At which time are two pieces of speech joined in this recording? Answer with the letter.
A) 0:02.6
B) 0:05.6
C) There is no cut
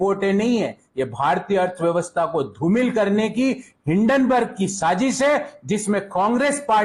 C